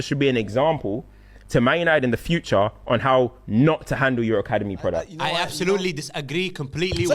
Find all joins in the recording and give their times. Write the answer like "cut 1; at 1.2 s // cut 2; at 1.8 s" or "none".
cut 1; at 5.1 s